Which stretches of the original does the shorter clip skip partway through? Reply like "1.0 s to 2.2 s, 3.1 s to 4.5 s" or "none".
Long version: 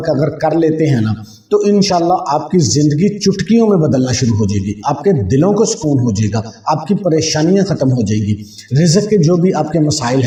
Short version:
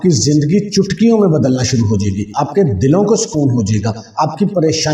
none